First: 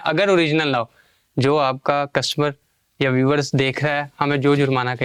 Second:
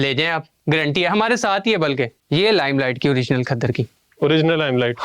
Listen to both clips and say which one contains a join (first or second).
second